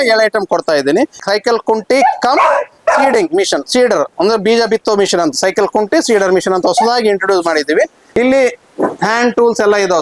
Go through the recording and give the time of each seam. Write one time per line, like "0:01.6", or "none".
0:01.1
0:08.0

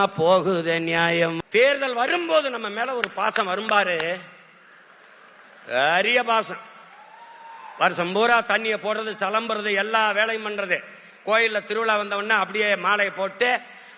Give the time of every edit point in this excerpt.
0:01.4

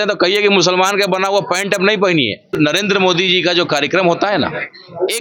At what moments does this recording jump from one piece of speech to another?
0:02.5

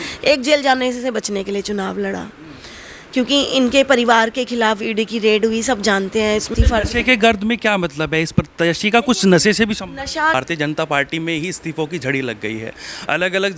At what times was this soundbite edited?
0:06.5
0:10.3

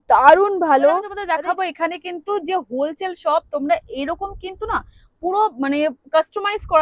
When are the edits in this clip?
0:01.1

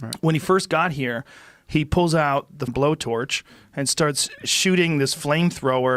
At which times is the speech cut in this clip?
0:02.6

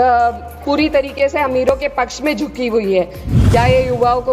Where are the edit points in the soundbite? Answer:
0:03.2

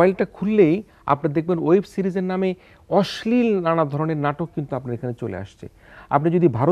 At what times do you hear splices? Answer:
none

